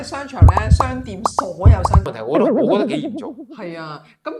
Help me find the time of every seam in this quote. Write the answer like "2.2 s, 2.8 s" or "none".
2.1 s